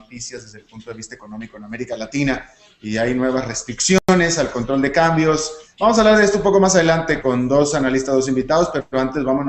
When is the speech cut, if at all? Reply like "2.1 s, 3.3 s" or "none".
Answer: none